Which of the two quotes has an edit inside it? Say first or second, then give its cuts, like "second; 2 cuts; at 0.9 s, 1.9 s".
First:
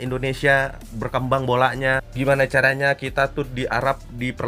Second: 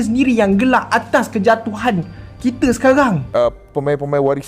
second; 1 cut; at 3.2 s